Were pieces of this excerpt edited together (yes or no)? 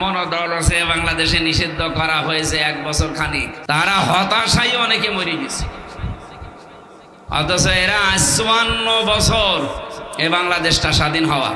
yes